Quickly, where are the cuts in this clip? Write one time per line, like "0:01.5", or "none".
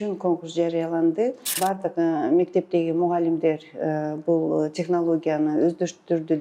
0:01.5